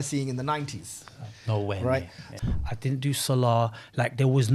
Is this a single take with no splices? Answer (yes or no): no